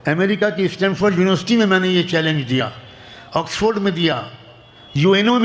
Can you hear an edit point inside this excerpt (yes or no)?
no